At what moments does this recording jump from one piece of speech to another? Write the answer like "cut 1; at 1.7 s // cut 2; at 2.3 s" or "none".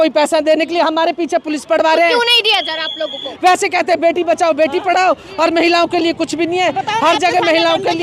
cut 1; at 3.3 s